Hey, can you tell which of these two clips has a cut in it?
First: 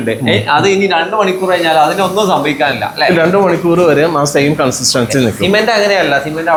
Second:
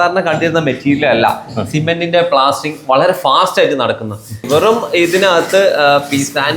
second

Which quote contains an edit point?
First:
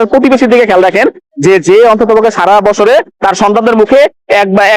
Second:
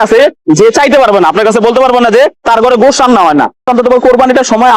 second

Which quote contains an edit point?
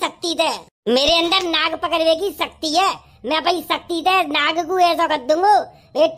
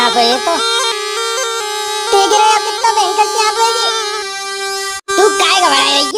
second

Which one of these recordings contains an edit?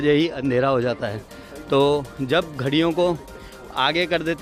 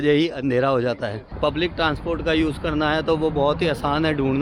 second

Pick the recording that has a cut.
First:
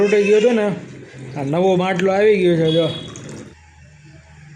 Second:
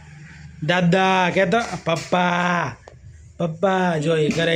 first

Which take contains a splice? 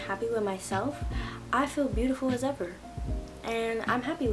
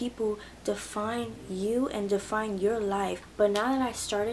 second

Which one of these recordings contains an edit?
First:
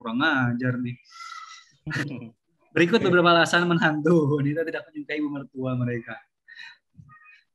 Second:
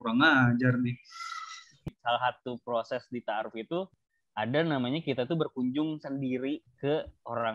second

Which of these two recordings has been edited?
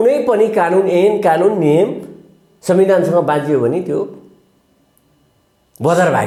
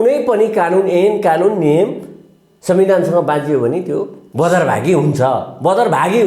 second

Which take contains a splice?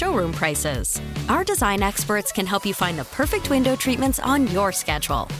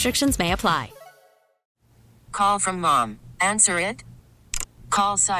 second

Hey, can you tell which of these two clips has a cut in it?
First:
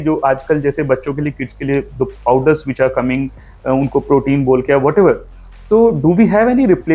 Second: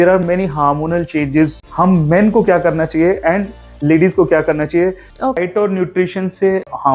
second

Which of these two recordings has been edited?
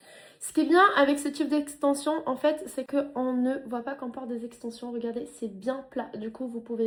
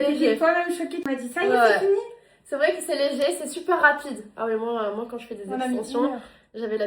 second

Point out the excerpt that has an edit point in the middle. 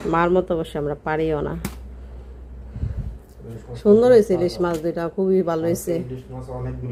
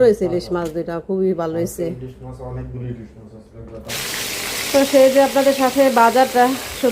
second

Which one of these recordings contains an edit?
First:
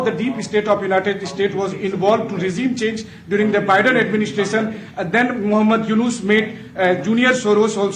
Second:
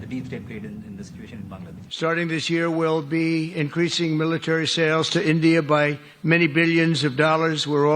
second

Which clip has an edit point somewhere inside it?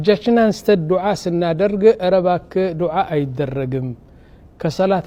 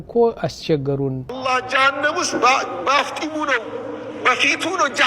second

